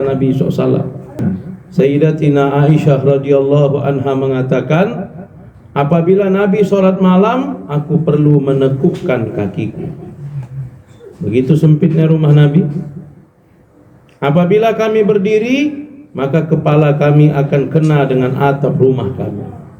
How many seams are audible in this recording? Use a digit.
1